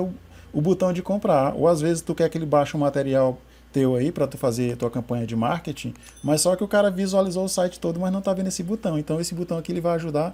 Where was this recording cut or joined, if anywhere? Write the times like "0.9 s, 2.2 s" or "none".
none